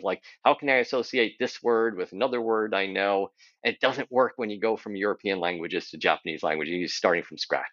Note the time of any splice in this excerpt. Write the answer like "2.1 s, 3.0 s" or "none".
none